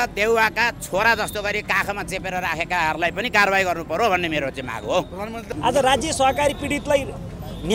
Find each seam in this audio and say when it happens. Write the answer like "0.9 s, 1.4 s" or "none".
5.4 s